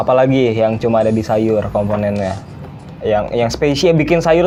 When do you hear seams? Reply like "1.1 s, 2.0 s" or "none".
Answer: none